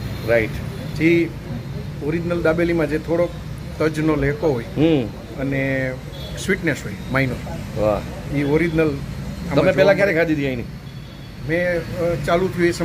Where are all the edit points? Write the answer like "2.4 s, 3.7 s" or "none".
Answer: none